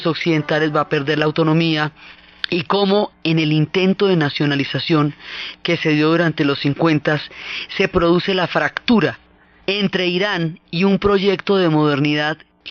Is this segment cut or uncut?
cut